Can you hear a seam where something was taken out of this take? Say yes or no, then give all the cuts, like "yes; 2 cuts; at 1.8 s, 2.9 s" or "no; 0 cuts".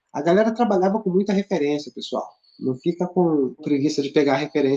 yes; 1 cut; at 3.6 s